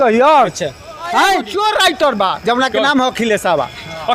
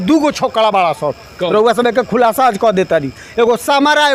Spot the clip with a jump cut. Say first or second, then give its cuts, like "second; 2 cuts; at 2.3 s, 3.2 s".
first; 1 cut; at 1.5 s